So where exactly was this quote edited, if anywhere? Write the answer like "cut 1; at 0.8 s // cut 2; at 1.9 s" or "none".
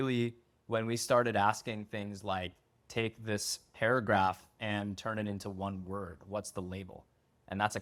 none